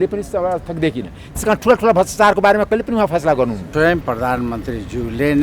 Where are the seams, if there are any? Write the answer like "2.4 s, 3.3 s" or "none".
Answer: 3.6 s